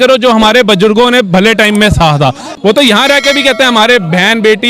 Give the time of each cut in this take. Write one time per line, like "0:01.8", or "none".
0:02.5